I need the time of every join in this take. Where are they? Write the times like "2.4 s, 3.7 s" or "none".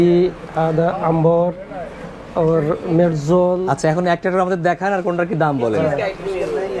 none

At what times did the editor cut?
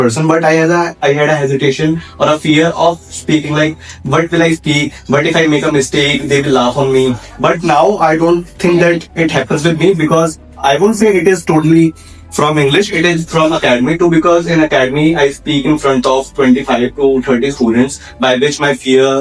none

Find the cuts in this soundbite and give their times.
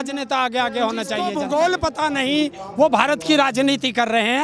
1.2 s

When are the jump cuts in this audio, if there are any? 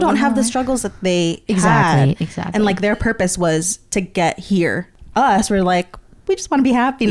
4.9 s

